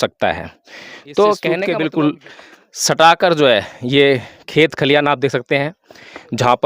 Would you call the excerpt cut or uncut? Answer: cut